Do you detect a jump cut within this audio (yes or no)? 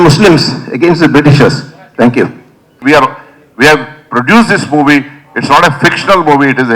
yes